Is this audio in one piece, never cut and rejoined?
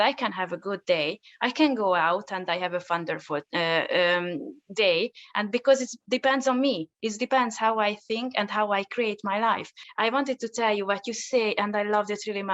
no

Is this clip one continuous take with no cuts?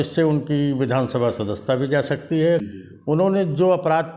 no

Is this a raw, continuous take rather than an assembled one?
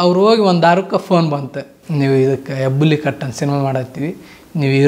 yes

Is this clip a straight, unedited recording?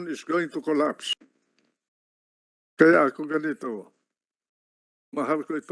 no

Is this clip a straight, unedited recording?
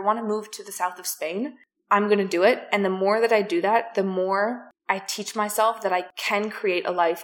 no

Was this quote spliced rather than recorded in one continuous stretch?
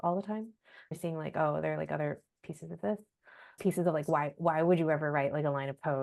yes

